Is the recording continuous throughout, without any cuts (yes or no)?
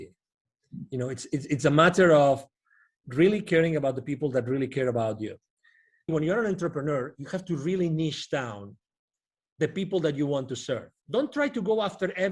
no